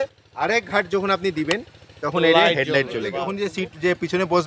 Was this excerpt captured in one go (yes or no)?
no